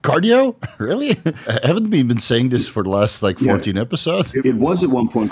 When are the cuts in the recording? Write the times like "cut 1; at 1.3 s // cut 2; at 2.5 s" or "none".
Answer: cut 1; at 1.5 s // cut 2; at 4.4 s